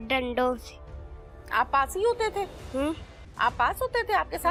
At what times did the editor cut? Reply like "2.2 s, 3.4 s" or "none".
none